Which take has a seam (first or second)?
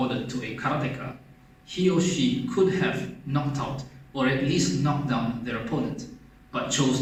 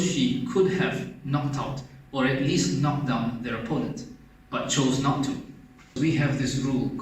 second